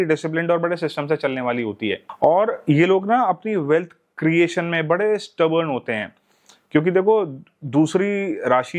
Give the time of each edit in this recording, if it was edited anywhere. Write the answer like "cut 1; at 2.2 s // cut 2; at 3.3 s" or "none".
cut 1; at 2.1 s